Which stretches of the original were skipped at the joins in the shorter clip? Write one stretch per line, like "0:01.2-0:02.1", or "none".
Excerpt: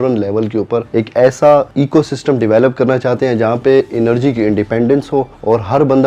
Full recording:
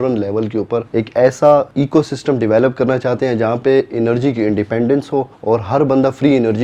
none